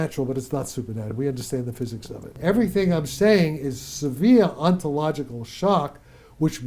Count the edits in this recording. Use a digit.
1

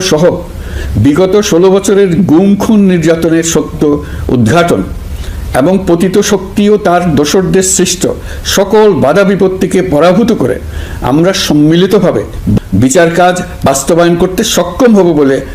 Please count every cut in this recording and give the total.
0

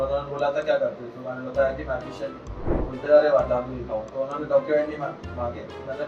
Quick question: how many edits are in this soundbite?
0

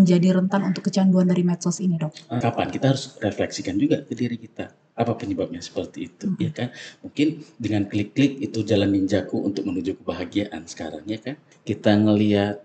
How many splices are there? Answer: 2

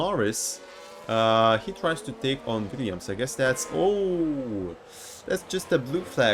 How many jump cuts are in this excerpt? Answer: 0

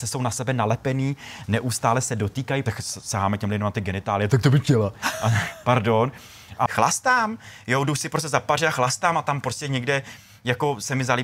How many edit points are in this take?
3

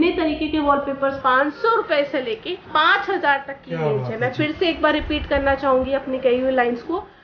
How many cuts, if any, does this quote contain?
1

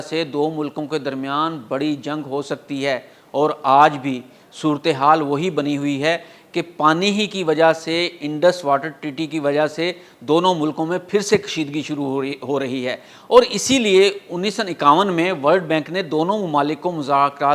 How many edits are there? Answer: 0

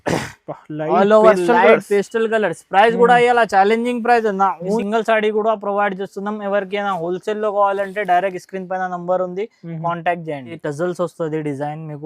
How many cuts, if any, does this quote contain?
2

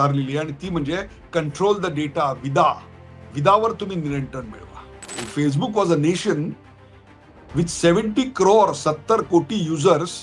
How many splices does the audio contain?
1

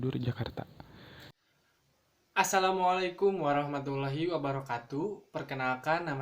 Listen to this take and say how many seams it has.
1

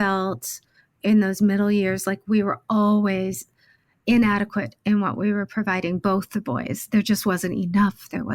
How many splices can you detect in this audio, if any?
0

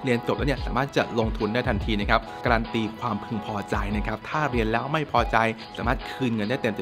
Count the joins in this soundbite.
2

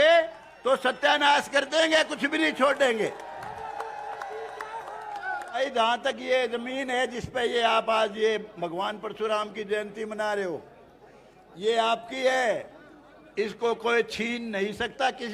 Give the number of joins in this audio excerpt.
1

